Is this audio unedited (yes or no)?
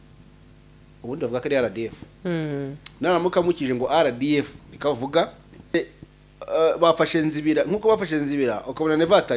no